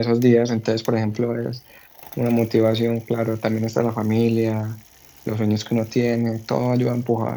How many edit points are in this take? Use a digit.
0